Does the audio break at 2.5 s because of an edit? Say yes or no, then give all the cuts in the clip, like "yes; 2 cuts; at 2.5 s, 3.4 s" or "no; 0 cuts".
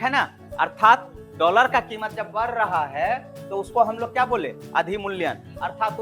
no; 0 cuts